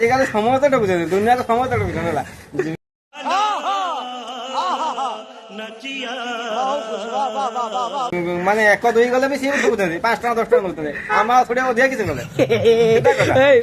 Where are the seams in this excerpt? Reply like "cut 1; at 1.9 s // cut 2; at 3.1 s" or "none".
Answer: none